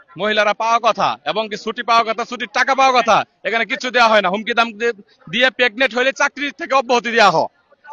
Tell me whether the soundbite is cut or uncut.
uncut